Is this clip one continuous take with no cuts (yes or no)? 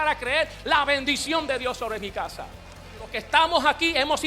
no